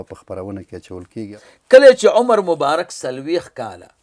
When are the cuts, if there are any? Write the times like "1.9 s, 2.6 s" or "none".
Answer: 1.3 s